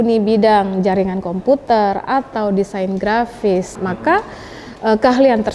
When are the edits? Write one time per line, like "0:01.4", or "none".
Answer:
0:03.8